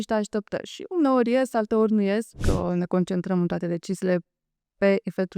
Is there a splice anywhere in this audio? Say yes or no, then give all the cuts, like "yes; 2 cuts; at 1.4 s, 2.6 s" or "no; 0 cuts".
yes; 1 cut; at 2.4 s